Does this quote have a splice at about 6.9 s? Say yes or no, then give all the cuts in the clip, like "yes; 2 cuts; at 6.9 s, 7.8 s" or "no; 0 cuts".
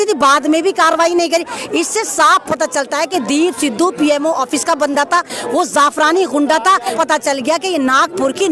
yes; 1 cut; at 6.9 s